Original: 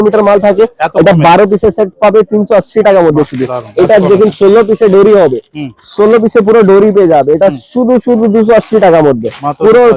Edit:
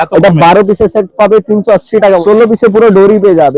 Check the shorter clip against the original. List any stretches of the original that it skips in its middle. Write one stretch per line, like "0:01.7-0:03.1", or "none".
0:03.0-0:05.9